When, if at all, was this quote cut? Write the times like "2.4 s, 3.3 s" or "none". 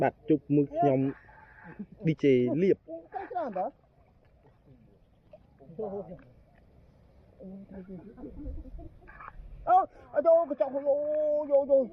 none

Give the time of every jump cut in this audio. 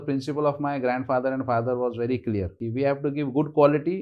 2.6 s

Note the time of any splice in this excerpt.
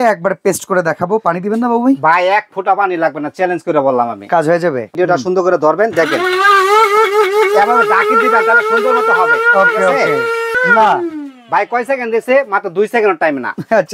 4.9 s, 10.5 s

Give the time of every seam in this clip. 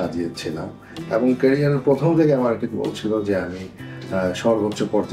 none

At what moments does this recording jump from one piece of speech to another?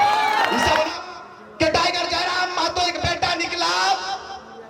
0.9 s

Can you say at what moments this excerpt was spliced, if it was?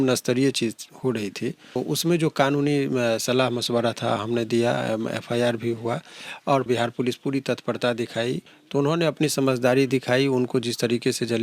1.8 s, 6.7 s, 8.5 s

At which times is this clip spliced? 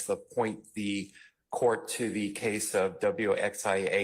2.3 s

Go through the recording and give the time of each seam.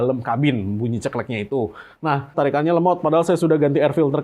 2.3 s

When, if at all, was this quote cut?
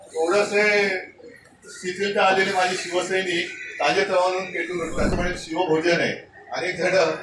5.1 s

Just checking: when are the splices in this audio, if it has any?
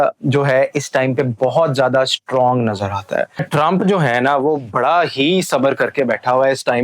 3.5 s

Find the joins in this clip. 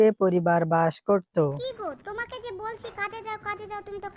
1.6 s

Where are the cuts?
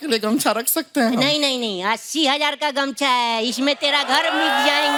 none

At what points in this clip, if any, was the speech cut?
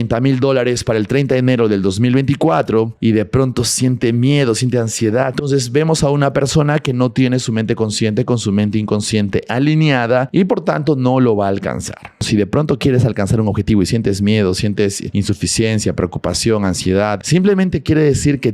2.9 s, 5.3 s, 10.3 s, 12.3 s, 15.0 s, 17.2 s

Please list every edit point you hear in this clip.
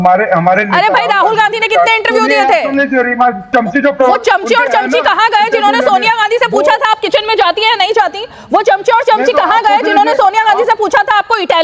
3.5 s

